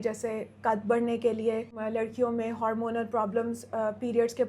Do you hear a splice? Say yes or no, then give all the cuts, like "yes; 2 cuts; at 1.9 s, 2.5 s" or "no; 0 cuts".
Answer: yes; 1 cut; at 1.7 s